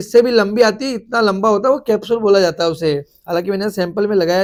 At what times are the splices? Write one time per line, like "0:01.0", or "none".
none